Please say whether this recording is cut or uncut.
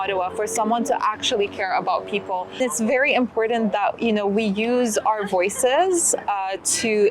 cut